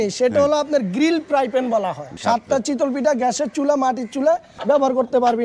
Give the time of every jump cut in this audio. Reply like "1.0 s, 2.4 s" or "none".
2.1 s, 4.5 s